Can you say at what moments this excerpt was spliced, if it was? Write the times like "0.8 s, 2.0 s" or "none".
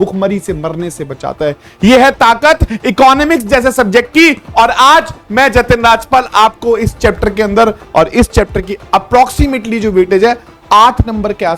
7.8 s